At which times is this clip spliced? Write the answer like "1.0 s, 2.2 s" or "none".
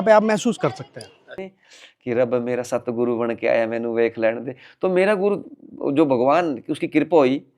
1.5 s